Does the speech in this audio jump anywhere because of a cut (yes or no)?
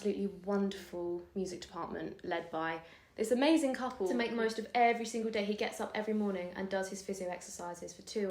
yes